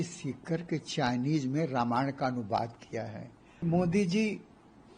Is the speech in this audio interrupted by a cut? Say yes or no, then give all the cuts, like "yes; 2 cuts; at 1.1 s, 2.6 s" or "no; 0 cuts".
yes; 1 cut; at 3.6 s